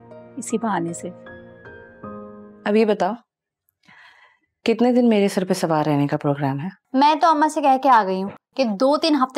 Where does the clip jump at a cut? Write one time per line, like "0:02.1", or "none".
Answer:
0:02.4
0:06.7

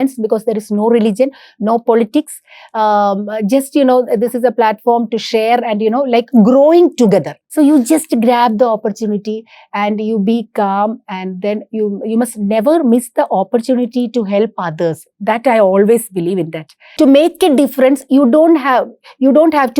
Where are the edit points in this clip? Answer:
0:07.4
0:16.9

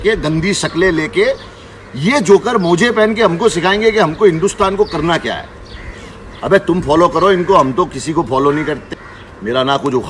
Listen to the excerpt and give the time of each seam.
0:08.8

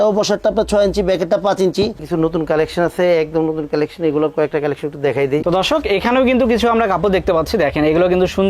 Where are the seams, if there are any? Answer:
0:02.0
0:05.4

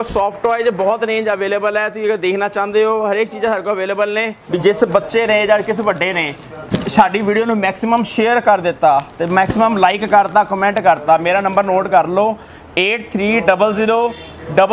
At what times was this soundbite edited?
0:04.4

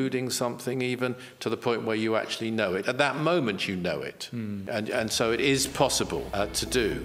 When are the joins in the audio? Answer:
0:04.6
0:06.3

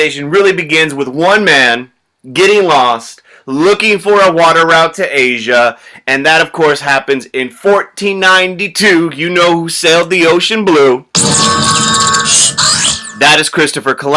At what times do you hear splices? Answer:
none

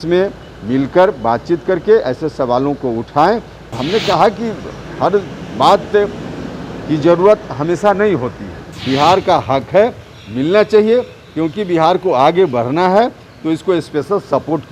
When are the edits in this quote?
0:03.7
0:08.6

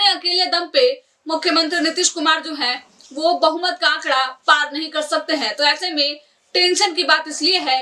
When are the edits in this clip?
none

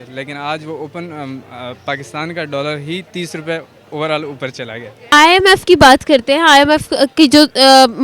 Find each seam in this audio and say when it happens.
0:05.0

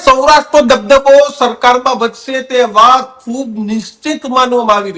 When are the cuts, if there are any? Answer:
none

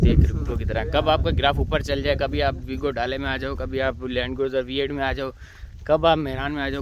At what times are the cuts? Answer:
none

